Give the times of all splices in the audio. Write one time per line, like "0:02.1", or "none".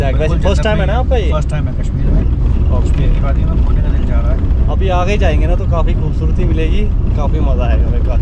none

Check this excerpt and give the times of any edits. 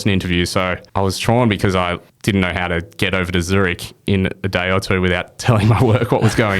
0:00.8
0:02.1

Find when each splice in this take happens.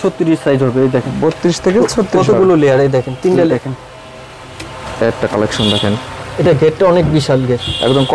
0:03.5

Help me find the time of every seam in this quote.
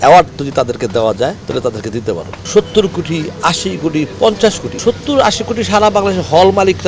0:01.4
0:02.4
0:04.7

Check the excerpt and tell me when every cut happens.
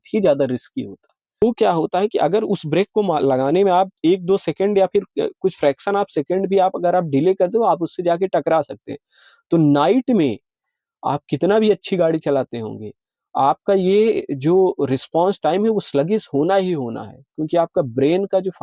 0:01.4

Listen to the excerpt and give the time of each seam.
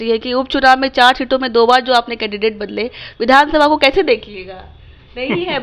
none

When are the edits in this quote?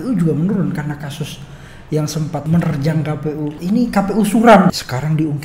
0:02.4
0:03.6
0:04.7

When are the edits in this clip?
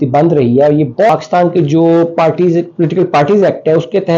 0:01.1

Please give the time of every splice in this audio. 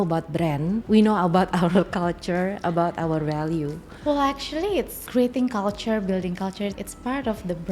0:00.8
0:05.0
0:06.8

